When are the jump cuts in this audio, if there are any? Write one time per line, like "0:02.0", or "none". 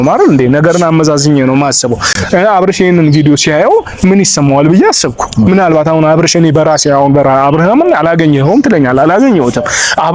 none